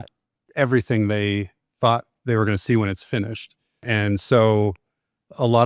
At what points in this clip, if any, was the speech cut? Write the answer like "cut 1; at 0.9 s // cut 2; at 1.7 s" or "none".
cut 1; at 3.8 s